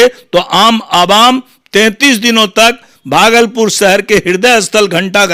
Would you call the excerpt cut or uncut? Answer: uncut